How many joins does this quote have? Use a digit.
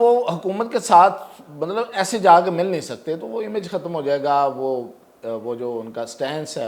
0